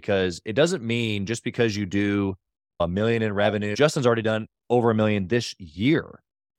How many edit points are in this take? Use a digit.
1